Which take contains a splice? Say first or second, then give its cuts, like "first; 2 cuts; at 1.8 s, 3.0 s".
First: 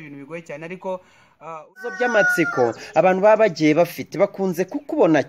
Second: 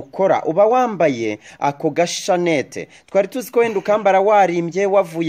first; 1 cut; at 1.8 s